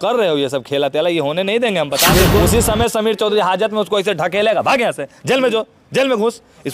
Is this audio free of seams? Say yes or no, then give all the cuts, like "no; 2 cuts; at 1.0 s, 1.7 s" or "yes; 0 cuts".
no; 1 cut; at 2.1 s